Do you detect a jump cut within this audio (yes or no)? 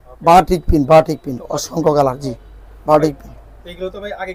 no